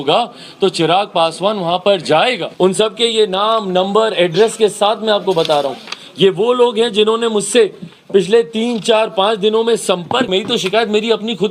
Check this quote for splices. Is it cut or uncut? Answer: cut